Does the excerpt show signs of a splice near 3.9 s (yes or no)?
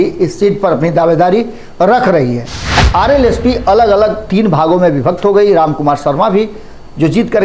no